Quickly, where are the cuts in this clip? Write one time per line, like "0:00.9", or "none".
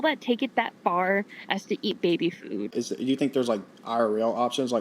0:02.7